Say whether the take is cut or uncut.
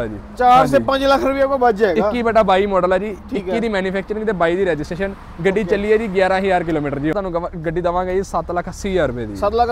cut